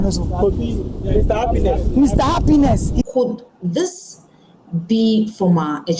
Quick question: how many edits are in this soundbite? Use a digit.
1